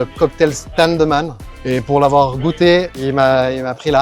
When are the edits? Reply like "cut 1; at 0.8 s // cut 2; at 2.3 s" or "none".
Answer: cut 1; at 2.9 s